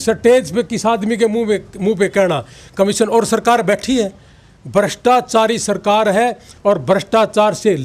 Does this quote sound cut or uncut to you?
uncut